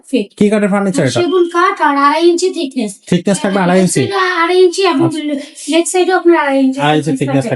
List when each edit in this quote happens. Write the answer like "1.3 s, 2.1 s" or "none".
none